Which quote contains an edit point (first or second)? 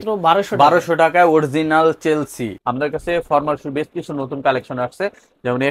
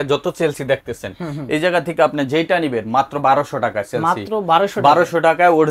first